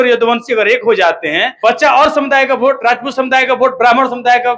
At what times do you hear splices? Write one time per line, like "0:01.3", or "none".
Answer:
0:01.5